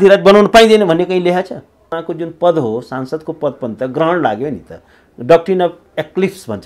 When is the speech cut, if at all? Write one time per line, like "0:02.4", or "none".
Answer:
0:02.0